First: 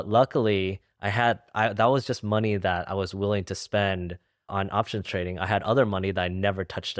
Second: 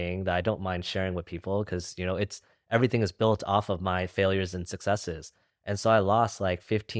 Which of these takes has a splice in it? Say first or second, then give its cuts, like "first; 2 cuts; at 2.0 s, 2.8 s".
first; 1 cut; at 4.5 s